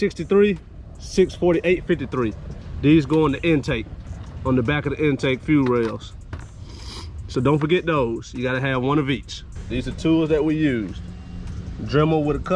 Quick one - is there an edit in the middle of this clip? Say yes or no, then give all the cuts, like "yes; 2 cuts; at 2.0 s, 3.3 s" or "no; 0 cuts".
no; 0 cuts